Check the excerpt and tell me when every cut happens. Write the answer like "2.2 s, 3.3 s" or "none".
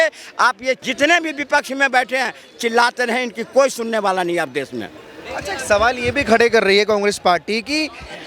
none